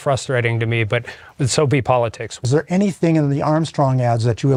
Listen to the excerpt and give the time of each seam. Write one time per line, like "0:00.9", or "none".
none